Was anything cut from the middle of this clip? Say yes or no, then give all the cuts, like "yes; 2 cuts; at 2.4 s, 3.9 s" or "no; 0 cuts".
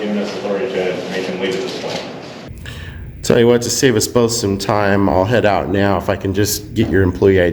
yes; 1 cut; at 2.5 s